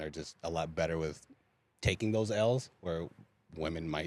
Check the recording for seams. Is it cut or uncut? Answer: uncut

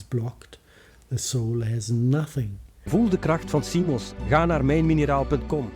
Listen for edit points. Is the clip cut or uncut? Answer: cut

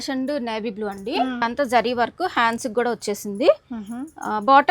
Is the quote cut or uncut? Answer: cut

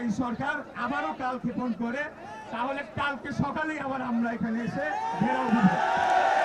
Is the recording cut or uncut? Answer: uncut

